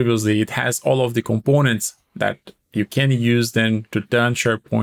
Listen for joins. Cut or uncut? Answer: uncut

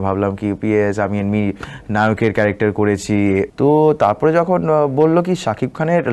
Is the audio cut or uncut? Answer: cut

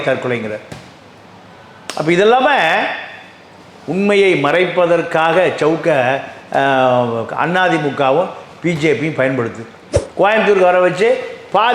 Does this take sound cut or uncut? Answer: cut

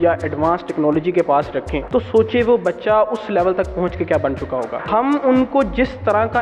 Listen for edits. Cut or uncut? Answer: cut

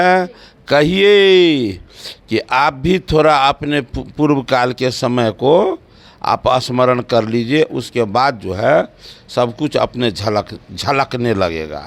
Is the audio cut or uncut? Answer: uncut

